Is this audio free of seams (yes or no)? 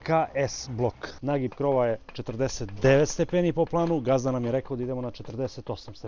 no